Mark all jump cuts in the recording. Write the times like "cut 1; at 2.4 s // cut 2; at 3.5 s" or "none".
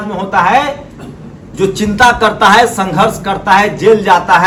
none